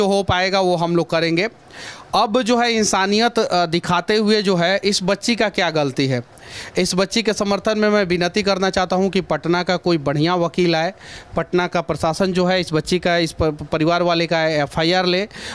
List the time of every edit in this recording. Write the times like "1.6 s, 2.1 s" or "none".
none

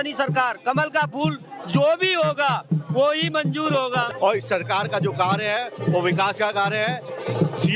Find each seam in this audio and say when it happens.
4.1 s

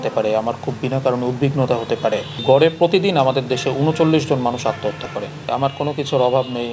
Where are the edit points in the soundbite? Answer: 2.4 s, 5.5 s

